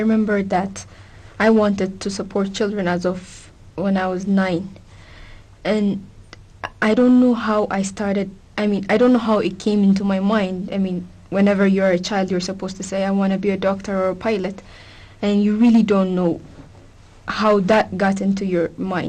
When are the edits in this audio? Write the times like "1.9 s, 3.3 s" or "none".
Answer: 3.0 s